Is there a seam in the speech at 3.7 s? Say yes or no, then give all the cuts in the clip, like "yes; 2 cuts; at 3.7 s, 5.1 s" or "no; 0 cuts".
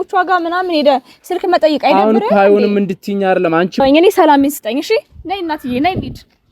yes; 1 cut; at 3.7 s